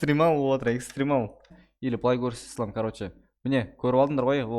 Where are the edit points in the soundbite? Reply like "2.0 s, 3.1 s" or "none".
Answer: 1.6 s